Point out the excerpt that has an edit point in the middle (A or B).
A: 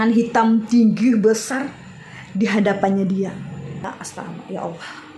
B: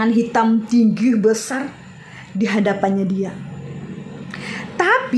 A